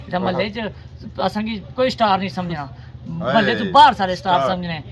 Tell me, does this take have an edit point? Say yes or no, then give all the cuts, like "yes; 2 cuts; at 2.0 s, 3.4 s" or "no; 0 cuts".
no; 0 cuts